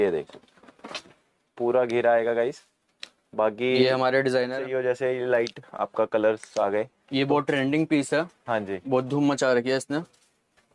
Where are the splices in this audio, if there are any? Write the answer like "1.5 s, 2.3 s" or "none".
4.6 s